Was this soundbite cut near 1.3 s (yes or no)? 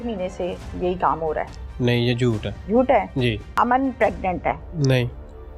no